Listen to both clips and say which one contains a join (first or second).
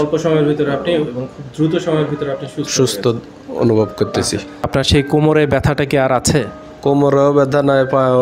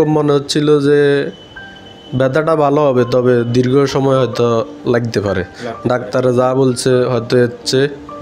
first